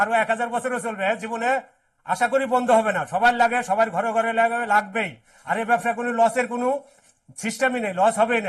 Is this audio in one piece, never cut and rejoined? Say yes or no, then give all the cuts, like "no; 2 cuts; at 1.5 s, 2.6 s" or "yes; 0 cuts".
yes; 0 cuts